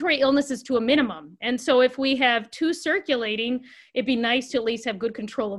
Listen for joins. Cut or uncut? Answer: uncut